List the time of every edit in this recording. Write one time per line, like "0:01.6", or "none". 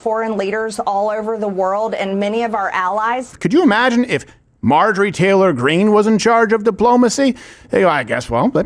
0:03.3